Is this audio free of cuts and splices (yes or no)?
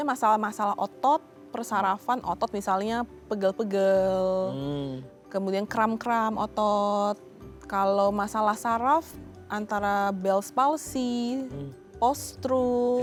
yes